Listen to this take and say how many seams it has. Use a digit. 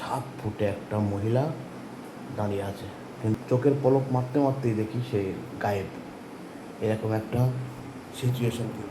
1